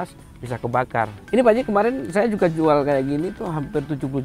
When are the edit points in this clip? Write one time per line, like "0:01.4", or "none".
0:01.2